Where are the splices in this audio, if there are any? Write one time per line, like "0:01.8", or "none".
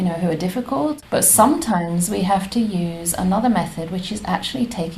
0:01.0